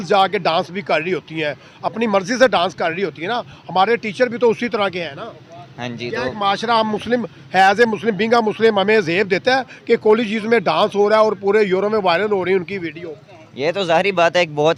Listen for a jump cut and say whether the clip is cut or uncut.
uncut